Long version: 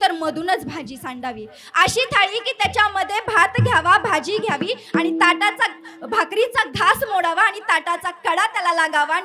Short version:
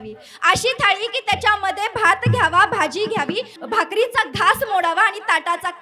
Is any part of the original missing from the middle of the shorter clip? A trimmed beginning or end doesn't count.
yes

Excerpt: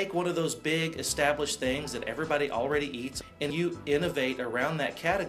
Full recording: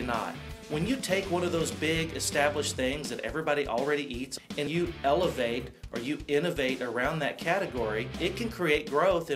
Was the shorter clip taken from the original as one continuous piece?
no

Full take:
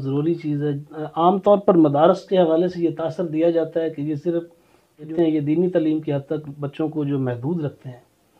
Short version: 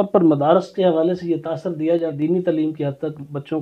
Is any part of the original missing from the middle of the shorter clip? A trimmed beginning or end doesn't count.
yes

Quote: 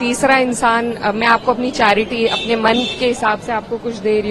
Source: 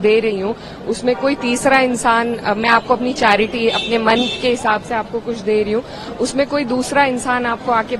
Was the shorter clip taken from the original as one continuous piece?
yes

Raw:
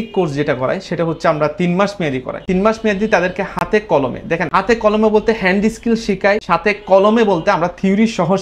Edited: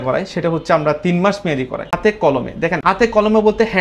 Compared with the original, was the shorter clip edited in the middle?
yes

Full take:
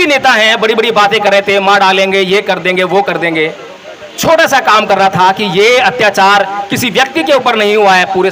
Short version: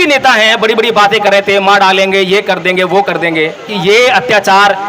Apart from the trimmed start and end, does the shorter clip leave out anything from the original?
yes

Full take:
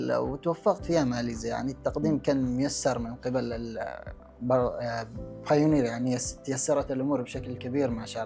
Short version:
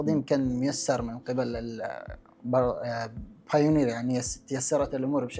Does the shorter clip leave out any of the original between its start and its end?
no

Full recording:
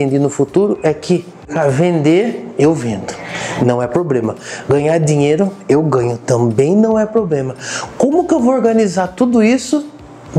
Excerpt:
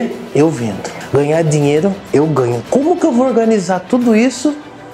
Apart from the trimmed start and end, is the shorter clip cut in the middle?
yes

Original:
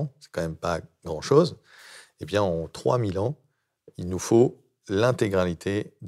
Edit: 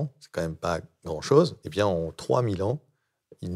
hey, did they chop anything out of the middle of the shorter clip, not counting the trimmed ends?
yes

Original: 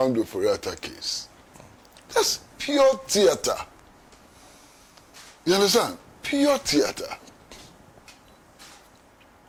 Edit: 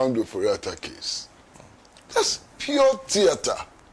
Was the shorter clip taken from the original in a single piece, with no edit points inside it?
yes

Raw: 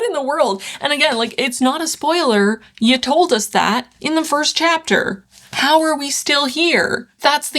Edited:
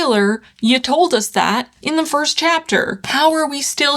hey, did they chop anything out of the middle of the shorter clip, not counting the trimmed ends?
yes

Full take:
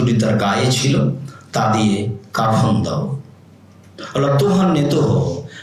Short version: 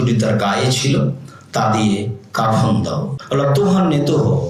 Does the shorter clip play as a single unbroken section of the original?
no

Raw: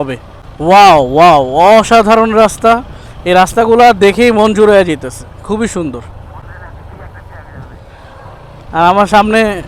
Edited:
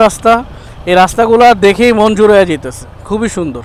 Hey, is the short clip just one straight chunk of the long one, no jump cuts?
yes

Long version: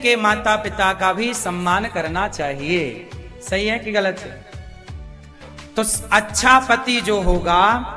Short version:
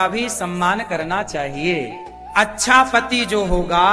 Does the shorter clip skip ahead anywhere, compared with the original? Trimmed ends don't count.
yes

